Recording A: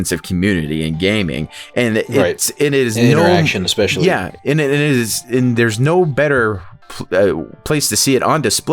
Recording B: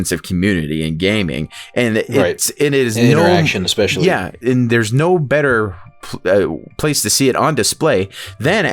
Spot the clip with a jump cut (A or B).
B